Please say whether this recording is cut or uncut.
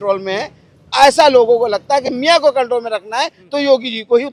uncut